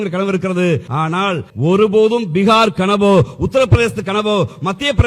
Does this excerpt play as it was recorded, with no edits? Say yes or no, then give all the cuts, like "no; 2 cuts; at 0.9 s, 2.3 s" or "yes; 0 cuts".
no; 1 cut; at 1.2 s